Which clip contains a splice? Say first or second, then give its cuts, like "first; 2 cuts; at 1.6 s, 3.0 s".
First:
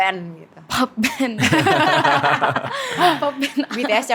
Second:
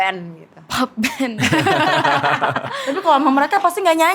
second; 1 cut; at 2.8 s